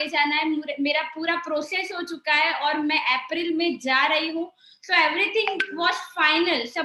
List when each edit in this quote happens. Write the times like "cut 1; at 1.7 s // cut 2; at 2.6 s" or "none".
none